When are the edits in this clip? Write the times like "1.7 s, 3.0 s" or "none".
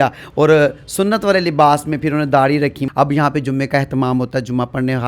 2.8 s

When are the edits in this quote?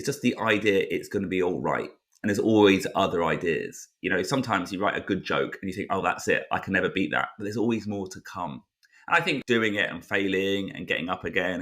9.4 s

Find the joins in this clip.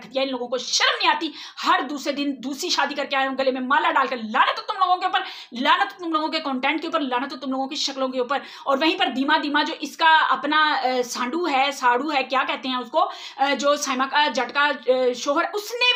none

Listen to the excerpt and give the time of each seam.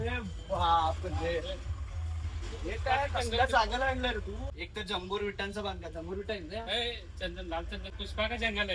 4.4 s

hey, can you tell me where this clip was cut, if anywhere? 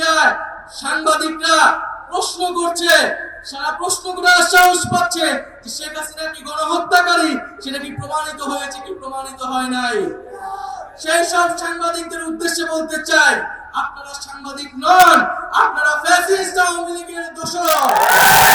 none

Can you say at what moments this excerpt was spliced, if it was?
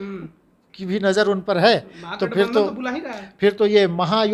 none

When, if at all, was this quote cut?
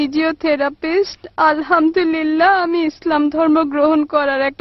none

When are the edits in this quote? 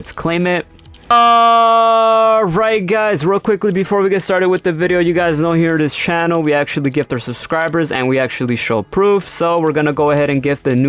1.1 s

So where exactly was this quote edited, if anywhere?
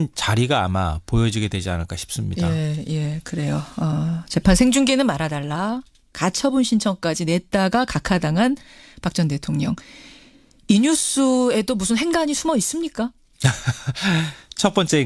none

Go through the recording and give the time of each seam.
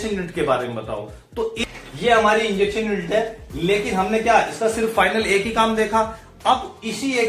1.6 s

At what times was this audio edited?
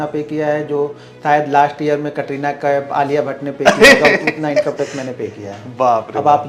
none

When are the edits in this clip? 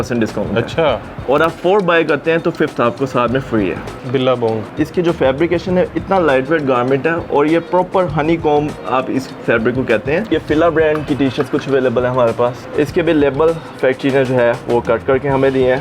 4.5 s, 10.3 s, 12.6 s

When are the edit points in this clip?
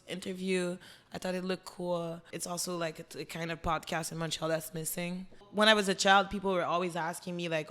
2.3 s, 5.5 s

